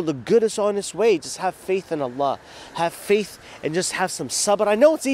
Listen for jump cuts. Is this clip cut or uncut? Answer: uncut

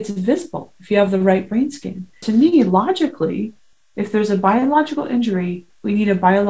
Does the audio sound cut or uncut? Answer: cut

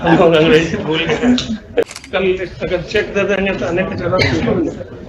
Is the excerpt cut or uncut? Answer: cut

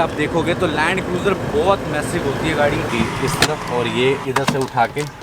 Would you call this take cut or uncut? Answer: cut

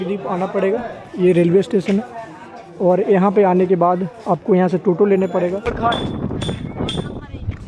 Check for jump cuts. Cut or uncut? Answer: cut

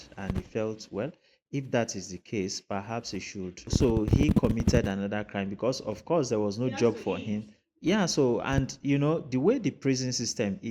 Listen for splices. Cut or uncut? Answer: cut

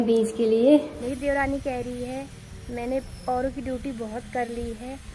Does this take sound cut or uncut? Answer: cut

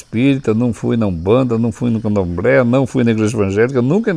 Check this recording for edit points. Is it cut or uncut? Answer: uncut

